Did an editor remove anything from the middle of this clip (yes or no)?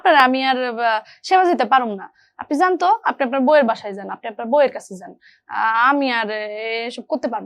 no